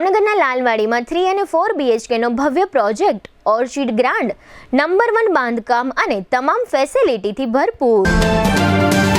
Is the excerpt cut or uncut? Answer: cut